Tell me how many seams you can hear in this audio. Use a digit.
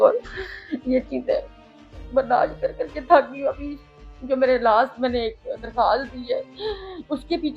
0